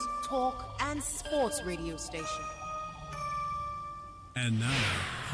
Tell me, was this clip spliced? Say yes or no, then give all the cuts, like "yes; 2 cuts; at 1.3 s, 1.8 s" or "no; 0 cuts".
yes; 1 cut; at 4.1 s